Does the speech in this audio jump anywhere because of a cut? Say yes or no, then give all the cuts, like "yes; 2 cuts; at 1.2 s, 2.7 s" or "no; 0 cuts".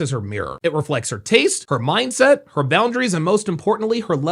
no; 0 cuts